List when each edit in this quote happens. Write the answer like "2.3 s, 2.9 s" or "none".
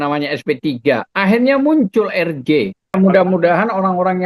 2.9 s